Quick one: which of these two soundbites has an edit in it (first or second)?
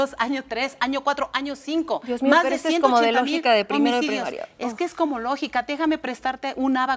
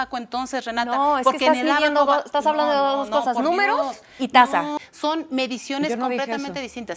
second